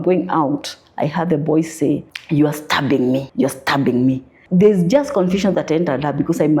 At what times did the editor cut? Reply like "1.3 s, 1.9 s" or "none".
2.1 s, 3.3 s, 4.3 s